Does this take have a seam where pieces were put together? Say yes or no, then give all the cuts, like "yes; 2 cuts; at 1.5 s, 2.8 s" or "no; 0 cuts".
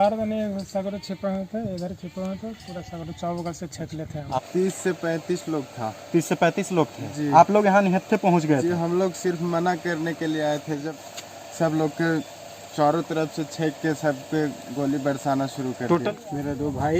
yes; 3 cuts; at 4.4 s, 11.0 s, 16.0 s